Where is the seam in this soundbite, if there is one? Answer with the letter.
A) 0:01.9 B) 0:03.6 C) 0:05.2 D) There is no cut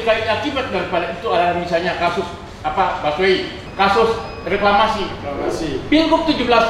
B